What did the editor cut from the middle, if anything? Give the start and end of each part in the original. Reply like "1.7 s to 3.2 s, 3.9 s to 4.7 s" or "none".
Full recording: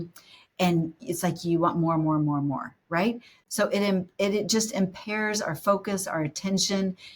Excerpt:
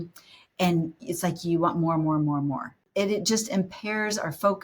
2.8 s to 4.1 s